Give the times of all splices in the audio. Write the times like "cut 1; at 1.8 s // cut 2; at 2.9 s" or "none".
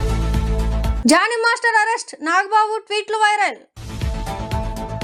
none